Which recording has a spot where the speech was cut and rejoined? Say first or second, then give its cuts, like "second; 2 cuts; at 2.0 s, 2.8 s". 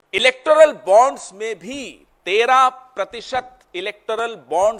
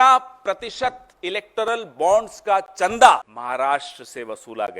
second; 1 cut; at 3.3 s